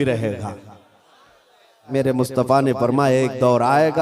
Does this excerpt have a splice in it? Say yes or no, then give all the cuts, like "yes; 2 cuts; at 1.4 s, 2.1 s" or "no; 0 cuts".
yes; 1 cut; at 1.8 s